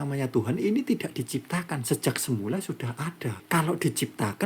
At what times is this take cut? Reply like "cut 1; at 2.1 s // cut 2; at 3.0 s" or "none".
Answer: cut 1; at 3.4 s